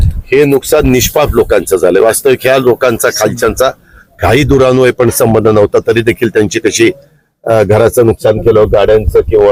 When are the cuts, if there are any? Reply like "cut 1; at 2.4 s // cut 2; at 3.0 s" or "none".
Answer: none